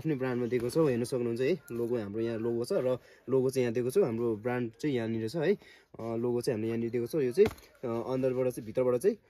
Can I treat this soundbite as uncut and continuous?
yes; 0 cuts

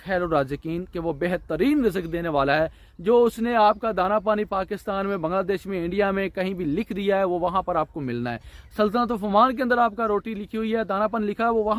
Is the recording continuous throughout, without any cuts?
yes; 0 cuts

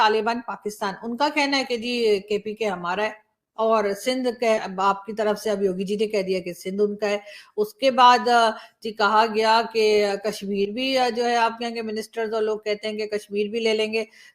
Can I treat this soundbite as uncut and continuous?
yes; 0 cuts

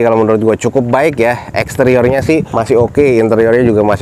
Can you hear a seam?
yes; 1 cut; at 2.5 s

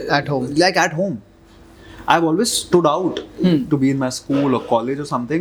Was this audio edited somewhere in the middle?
no; 0 cuts

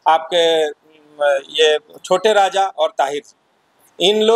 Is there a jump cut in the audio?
no; 0 cuts

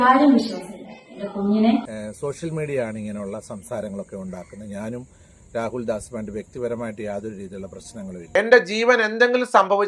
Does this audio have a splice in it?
yes; 2 cuts; at 1.9 s, 8.2 s

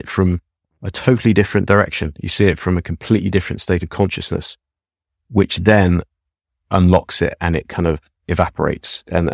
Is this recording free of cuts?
yes; 0 cuts

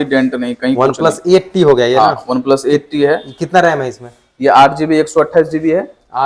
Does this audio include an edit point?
no; 0 cuts

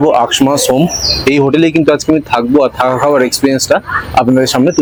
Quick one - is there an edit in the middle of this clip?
no; 0 cuts

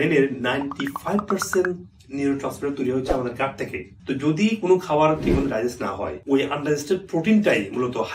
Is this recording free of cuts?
yes; 0 cuts

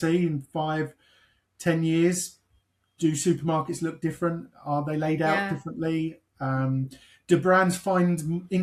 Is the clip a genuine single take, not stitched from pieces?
yes; 0 cuts

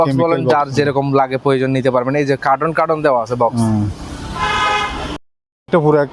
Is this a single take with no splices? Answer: yes; 0 cuts

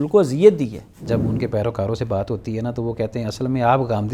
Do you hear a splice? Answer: yes; 1 cut; at 1.0 s

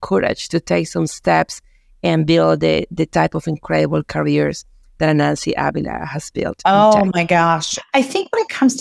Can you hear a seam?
yes; 1 cut; at 7.8 s

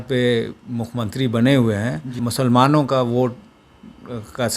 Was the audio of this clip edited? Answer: yes; 1 cut; at 2.1 s

